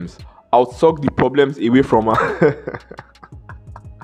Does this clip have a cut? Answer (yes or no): no